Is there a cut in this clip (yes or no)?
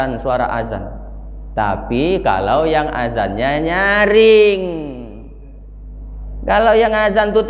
no